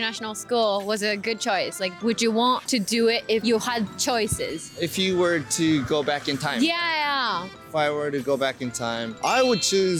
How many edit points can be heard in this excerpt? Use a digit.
0